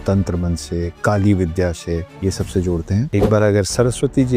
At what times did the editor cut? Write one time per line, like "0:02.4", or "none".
0:00.9
0:02.1
0:03.1

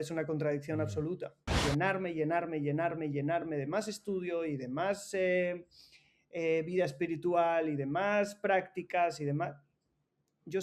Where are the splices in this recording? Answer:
0:01.6

